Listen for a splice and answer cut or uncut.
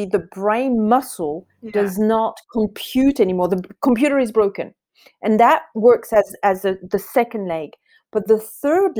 uncut